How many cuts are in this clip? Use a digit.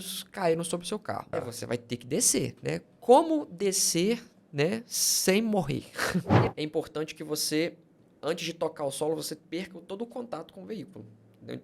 2